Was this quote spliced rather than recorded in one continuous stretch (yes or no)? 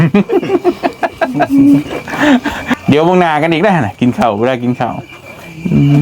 yes